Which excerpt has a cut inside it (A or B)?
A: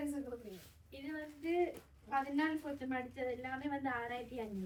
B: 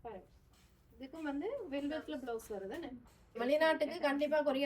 B